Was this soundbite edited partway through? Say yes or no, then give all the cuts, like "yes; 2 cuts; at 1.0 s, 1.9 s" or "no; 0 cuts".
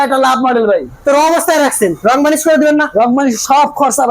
yes; 1 cut; at 2.0 s